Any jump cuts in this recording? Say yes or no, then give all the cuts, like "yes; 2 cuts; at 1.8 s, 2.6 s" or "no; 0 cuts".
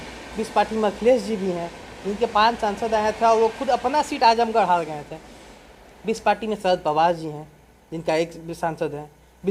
no; 0 cuts